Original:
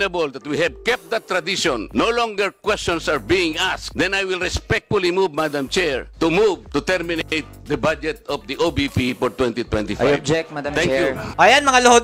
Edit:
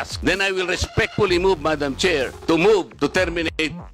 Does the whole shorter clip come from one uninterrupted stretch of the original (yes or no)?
yes